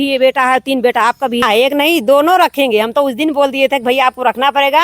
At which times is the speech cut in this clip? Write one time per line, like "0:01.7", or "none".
0:01.4